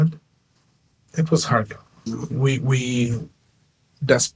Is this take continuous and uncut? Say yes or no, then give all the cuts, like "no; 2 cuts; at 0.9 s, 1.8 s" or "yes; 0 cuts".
no; 1 cut; at 1.0 s